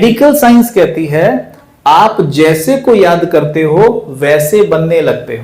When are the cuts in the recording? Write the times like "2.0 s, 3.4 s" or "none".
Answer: none